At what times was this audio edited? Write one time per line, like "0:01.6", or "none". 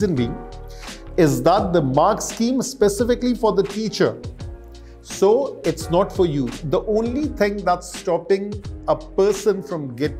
0:06.6